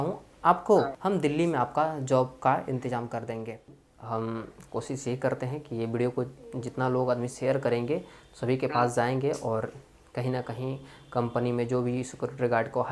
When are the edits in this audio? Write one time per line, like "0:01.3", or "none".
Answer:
0:01.0
0:03.7